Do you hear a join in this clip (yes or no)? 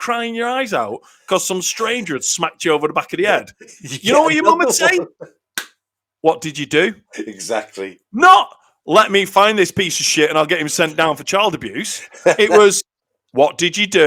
no